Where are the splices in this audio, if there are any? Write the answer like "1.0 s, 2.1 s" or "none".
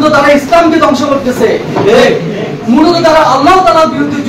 none